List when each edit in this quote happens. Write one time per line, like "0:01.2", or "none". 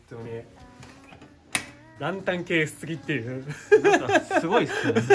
0:01.9